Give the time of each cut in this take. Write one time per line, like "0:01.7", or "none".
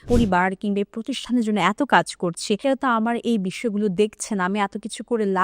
0:02.6